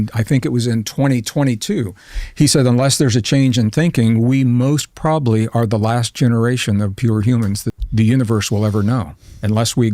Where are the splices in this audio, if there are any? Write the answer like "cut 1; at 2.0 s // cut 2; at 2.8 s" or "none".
cut 1; at 7.8 s